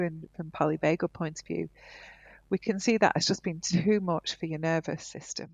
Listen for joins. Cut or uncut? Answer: uncut